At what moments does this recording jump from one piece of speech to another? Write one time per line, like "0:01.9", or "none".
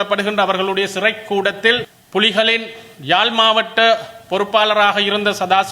0:02.0